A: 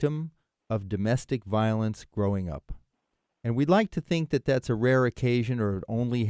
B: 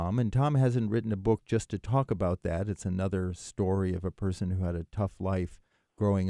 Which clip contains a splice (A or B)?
A